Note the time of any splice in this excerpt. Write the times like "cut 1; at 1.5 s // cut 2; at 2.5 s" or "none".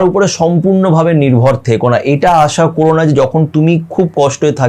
none